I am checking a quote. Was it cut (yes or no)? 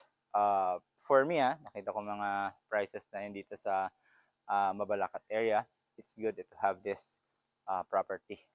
no